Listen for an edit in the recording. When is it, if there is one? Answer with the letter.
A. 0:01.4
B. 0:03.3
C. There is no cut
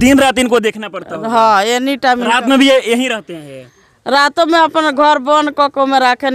C